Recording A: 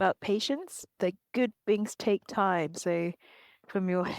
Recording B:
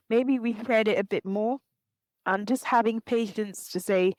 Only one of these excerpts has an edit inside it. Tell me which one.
A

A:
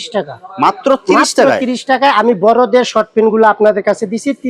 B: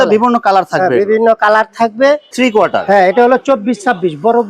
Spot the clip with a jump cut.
B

